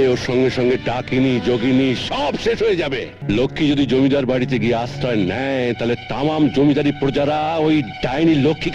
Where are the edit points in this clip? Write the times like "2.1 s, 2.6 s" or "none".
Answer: 3.1 s